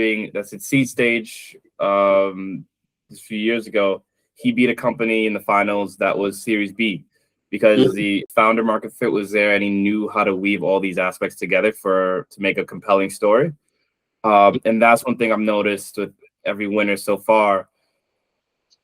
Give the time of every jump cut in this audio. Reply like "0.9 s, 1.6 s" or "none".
8.3 s